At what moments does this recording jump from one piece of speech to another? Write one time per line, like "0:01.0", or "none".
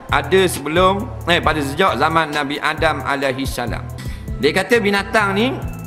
0:03.9